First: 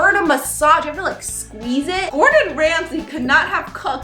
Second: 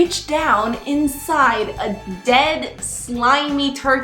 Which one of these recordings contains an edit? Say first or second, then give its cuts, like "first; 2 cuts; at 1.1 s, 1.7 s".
first; 1 cut; at 2.1 s